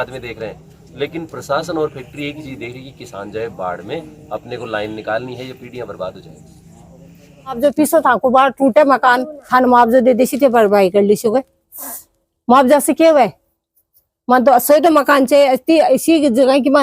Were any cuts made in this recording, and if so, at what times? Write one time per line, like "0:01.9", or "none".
0:07.6